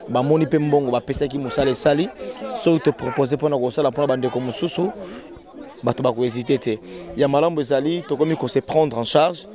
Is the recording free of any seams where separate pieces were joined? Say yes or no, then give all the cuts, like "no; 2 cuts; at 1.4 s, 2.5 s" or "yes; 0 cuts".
yes; 0 cuts